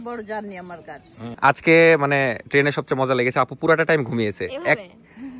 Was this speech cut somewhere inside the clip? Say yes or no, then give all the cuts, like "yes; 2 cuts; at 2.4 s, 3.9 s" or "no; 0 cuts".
yes; 1 cut; at 1.3 s